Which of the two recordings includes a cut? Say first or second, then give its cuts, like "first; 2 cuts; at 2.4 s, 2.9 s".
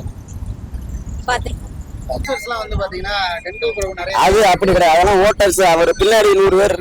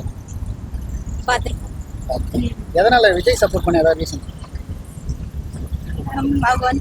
first; 1 cut; at 2.2 s